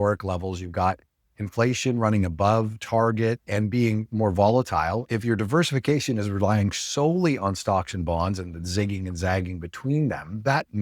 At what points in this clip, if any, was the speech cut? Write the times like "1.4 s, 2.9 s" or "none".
5.1 s